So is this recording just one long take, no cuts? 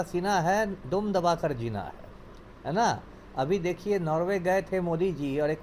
yes; 0 cuts

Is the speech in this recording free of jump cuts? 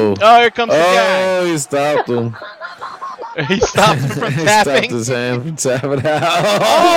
yes; 0 cuts

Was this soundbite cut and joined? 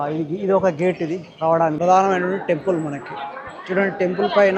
yes; 1 cut; at 1.8 s

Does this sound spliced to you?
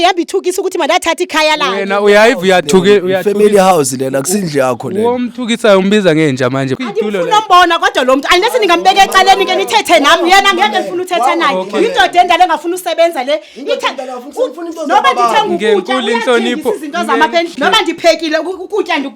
yes; 2 cuts; at 6.7 s, 17.5 s

